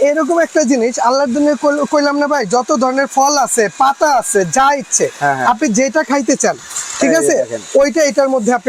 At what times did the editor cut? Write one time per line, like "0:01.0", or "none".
none

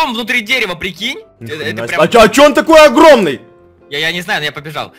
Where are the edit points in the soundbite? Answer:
0:01.3

